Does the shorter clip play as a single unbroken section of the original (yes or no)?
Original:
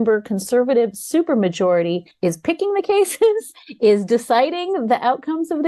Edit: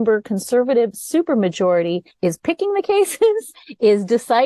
yes